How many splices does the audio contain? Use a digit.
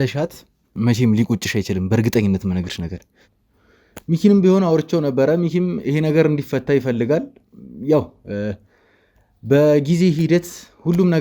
1